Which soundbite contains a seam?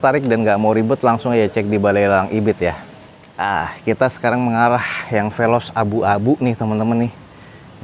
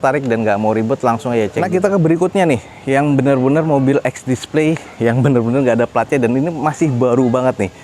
second; 1 cut; at 1.5 s

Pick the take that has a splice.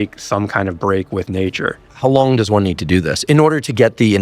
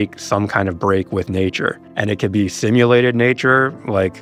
first; 1 cut; at 1.9 s

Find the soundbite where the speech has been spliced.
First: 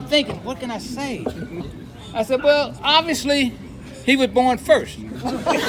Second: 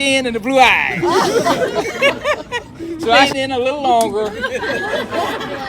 second; 1 cut; at 3.3 s

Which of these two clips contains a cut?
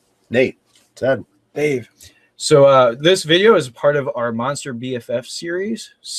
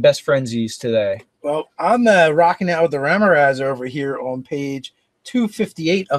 second; 1 cut; at 1.0 s

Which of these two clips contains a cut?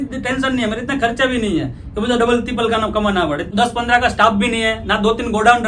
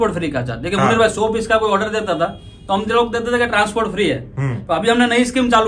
first; 1 cut; at 3.5 s

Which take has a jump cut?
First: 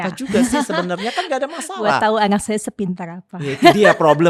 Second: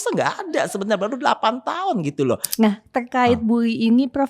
second; 1 cut; at 2.5 s

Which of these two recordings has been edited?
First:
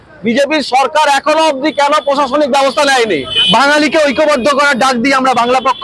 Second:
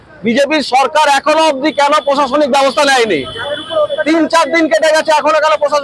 first; 1 cut; at 3.3 s

